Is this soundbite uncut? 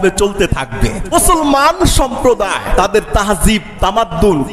no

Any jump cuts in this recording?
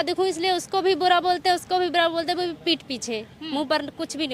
no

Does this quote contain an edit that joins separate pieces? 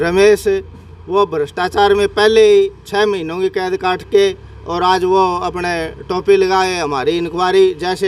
no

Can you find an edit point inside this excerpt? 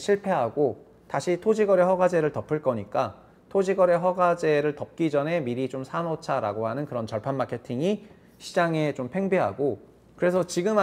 no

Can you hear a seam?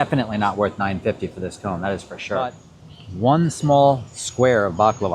yes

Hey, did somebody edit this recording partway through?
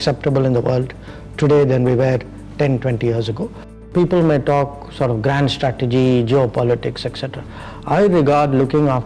yes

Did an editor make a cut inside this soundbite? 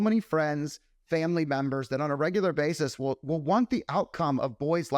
no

